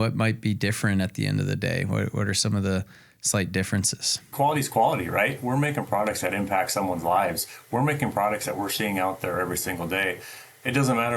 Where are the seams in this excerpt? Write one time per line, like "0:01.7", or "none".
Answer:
0:04.3